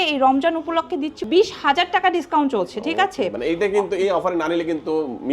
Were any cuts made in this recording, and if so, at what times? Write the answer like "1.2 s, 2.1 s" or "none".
1.2 s

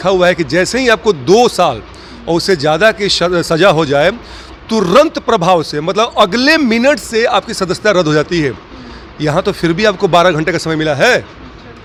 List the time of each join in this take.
none

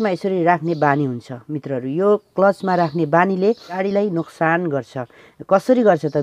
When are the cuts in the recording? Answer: 3.8 s

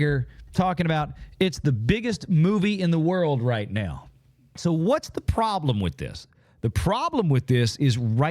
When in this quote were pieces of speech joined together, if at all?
4.5 s

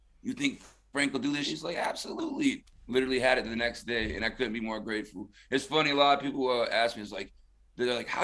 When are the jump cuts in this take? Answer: 1.5 s

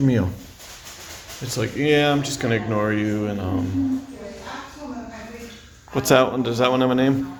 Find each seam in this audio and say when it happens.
none

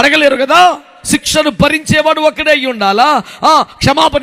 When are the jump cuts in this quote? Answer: 0.9 s

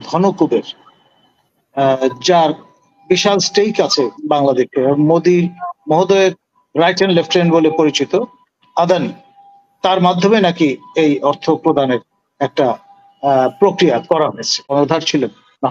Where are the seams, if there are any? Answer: 14.7 s

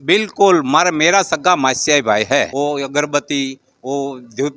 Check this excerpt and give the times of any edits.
2.5 s

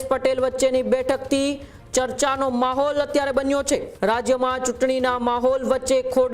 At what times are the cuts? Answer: 3.9 s

